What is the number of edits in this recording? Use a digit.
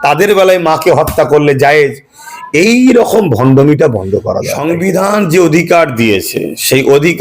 1